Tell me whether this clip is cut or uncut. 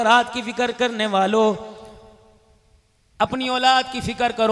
uncut